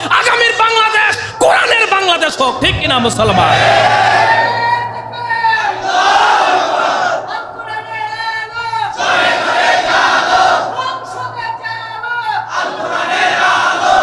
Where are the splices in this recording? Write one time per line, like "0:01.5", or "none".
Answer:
none